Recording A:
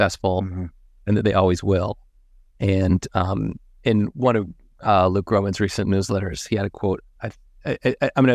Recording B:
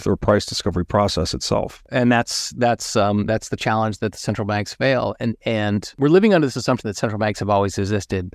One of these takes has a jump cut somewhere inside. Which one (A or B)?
B